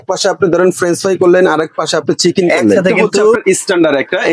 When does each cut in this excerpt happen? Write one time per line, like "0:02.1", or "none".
0:03.3